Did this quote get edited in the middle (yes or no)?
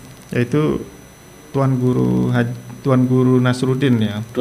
no